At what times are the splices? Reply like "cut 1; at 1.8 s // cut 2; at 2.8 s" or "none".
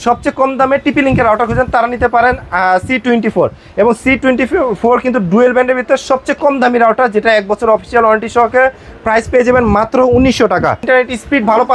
cut 1; at 10.8 s